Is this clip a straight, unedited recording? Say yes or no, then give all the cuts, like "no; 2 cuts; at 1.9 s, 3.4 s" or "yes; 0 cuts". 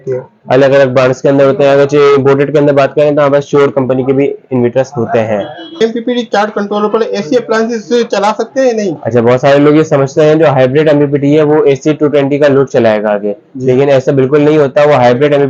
no; 1 cut; at 5.8 s